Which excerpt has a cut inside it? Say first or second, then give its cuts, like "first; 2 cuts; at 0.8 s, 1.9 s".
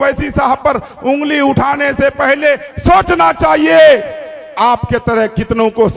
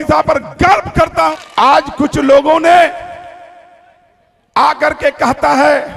second; 1 cut; at 1.3 s